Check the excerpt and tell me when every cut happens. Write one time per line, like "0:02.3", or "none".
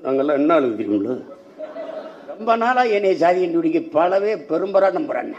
0:02.4